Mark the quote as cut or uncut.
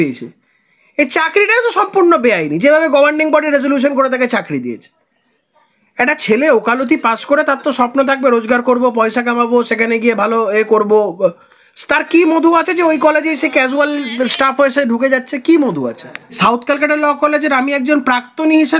cut